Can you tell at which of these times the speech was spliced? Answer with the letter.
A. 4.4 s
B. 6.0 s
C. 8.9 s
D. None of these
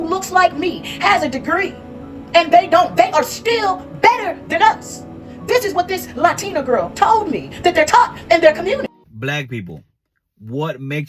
C